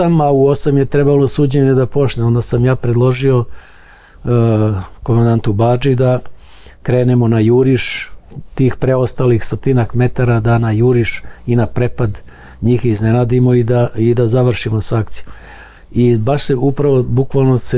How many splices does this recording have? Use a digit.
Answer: 0